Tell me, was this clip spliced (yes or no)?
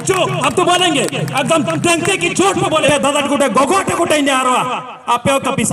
yes